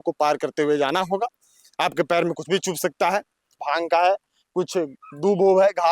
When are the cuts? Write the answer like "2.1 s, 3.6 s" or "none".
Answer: 3.6 s